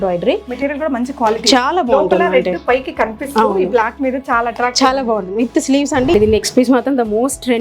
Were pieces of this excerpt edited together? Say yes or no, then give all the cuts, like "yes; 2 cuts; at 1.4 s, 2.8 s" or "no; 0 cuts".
yes; 1 cut; at 6.1 s